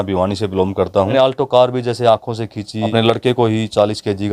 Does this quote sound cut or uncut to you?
cut